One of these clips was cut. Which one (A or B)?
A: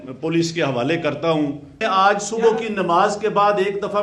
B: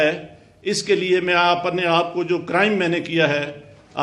A